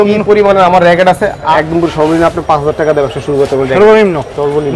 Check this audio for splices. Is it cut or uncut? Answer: cut